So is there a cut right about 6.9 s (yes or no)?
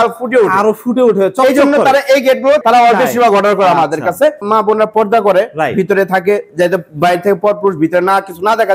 no